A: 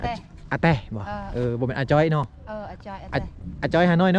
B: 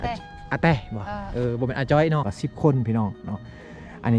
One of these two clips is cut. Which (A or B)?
B